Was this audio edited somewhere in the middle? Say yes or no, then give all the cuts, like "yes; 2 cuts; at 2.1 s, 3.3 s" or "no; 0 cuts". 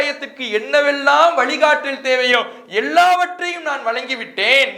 no; 0 cuts